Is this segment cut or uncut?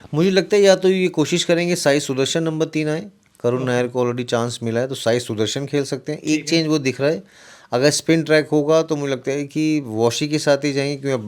uncut